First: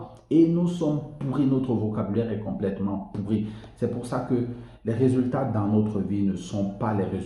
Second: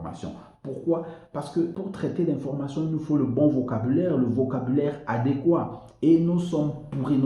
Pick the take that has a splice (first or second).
second